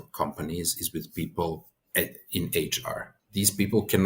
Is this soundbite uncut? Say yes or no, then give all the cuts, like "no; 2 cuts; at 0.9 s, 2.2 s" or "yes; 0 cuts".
no; 2 cuts; at 1.7 s, 3.1 s